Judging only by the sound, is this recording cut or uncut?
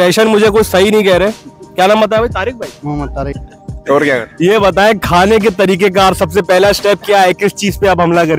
uncut